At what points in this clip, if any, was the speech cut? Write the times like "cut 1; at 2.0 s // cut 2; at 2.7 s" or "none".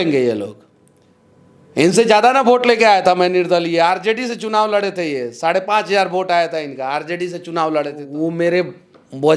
cut 1; at 8.0 s